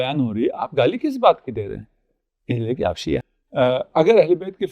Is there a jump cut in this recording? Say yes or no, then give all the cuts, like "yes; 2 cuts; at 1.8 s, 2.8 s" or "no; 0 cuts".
yes; 1 cut; at 3.4 s